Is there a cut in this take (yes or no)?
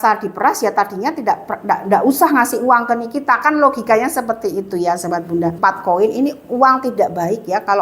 yes